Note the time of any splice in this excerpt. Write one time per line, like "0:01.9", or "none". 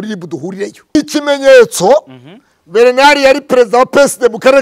0:01.0

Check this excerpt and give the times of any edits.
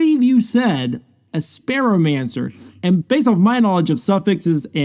none

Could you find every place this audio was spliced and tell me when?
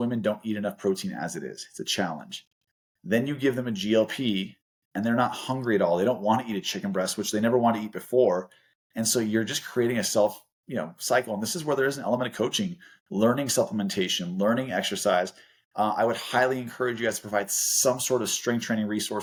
none

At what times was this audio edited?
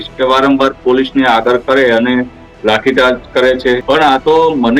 0:03.8

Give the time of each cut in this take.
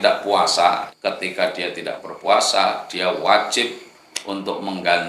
0:00.9

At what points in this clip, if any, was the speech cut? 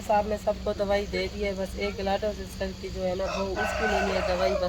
none

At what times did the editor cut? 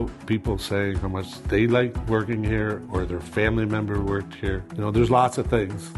0:01.3
0:02.0
0:04.7

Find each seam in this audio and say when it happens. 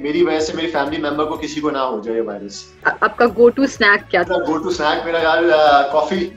0:02.9
0:04.3

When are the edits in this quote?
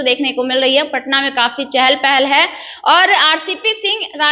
none

